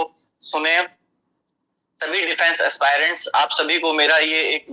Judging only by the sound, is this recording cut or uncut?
uncut